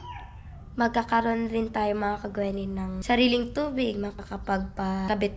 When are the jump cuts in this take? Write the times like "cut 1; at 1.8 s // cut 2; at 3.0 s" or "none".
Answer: cut 1; at 3.0 s // cut 2; at 4.4 s